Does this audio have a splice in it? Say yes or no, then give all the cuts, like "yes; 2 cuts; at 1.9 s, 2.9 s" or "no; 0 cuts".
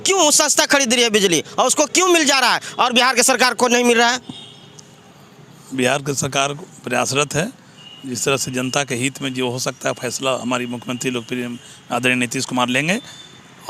no; 0 cuts